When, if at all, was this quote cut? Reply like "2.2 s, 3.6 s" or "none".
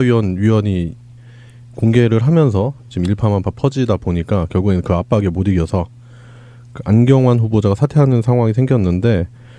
7.5 s